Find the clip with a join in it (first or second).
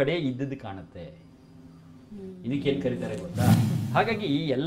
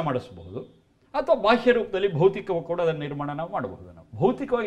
first